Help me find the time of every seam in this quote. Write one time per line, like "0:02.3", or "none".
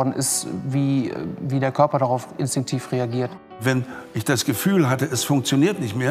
0:03.6

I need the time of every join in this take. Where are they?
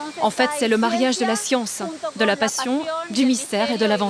none

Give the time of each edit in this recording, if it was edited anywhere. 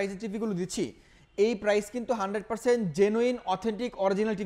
none

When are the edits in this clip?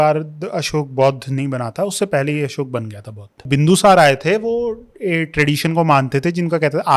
0:03.5

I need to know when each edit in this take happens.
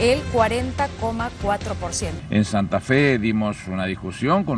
0:02.1

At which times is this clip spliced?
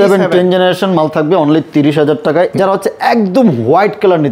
0:02.5

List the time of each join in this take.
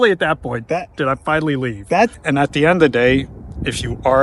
0:02.2

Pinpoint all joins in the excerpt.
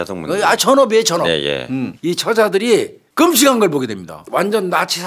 0:01.9
0:03.0
0:04.2

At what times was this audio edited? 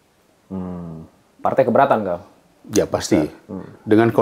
none

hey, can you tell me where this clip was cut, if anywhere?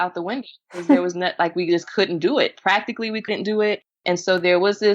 0:04.0

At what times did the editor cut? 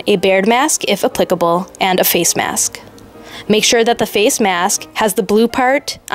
none

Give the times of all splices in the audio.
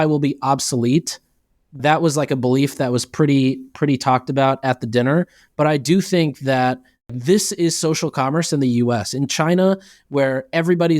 0:07.1

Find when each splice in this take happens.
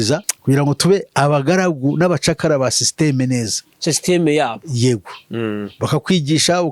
none

